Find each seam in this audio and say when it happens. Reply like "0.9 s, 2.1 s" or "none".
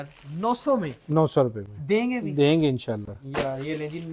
none